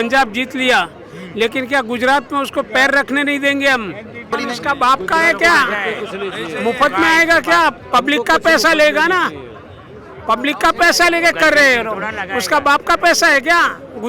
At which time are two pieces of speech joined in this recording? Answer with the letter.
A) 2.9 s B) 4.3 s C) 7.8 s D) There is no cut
B